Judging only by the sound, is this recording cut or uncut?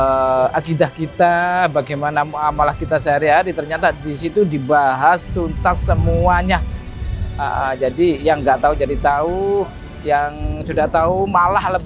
uncut